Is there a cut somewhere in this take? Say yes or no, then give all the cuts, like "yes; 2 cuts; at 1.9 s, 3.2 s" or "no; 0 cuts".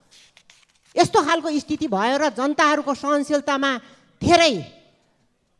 no; 0 cuts